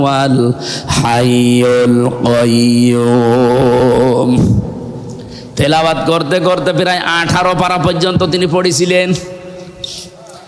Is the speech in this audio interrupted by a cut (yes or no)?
no